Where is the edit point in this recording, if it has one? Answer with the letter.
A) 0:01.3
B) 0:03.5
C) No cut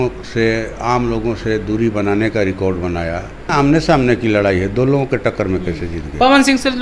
B